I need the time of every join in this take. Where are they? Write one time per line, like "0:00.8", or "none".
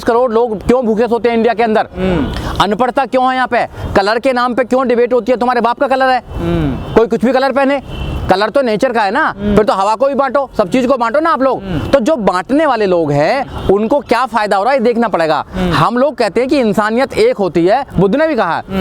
none